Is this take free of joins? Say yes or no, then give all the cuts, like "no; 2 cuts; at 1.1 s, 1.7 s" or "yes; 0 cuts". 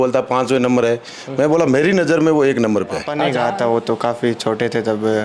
no; 1 cut; at 3.2 s